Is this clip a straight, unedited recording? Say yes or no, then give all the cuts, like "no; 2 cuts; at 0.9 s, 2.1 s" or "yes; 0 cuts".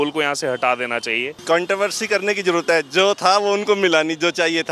no; 1 cut; at 1.3 s